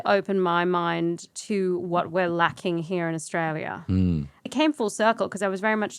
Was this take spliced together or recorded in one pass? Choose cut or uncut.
cut